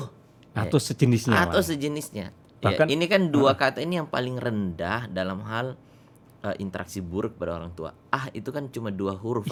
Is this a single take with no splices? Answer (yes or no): yes